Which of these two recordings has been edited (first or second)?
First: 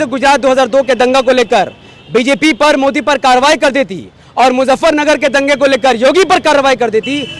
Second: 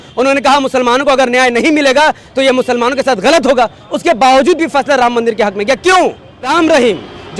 second